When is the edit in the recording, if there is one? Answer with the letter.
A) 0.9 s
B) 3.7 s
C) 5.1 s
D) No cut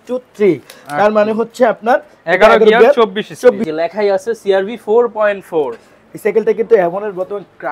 B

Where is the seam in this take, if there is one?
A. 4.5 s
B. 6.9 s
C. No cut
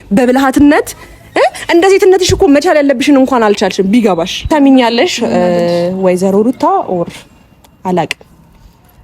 A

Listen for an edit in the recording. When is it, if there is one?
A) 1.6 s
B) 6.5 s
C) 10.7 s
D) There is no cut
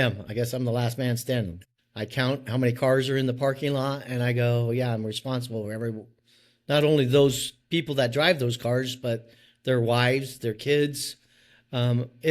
A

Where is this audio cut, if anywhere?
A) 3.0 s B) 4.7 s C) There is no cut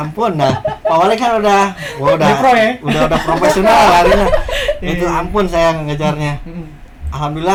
C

